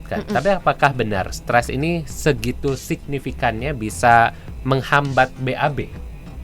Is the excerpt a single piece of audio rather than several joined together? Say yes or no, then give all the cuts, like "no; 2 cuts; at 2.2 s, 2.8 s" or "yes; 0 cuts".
yes; 0 cuts